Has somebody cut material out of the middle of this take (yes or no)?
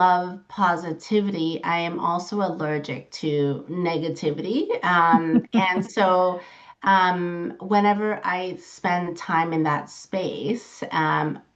no